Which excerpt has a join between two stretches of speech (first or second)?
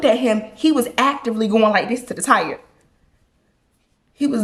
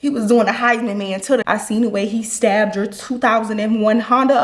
second